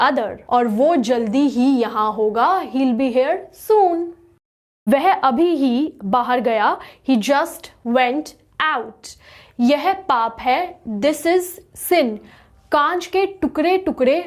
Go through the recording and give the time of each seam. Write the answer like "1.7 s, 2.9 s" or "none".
4.7 s

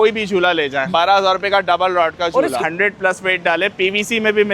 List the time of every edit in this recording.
0.9 s, 2.6 s

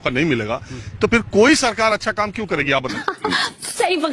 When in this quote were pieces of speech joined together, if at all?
2.9 s

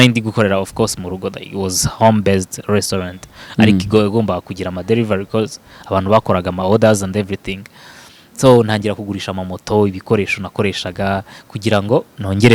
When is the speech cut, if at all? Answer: none

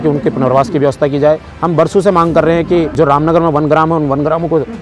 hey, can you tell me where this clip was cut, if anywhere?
1.5 s, 2.9 s

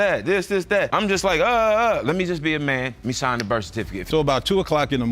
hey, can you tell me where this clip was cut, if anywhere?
0.9 s, 4.0 s

